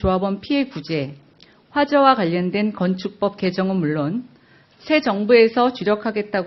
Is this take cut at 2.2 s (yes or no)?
yes